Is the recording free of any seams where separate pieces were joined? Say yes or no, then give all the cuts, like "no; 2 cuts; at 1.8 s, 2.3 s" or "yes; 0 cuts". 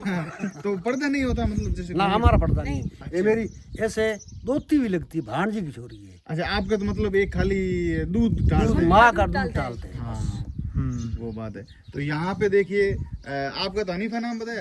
yes; 0 cuts